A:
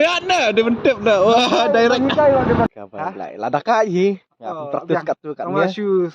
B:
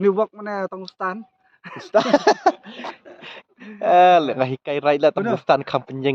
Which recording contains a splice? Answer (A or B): A